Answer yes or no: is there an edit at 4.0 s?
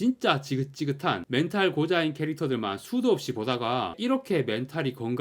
yes